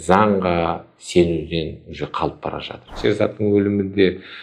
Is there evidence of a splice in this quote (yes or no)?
yes